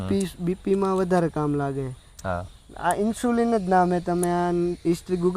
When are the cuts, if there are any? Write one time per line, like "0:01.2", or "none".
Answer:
none